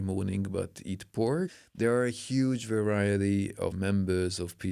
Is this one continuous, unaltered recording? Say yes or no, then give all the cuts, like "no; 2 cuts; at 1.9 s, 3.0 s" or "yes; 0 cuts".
no; 1 cut; at 3.8 s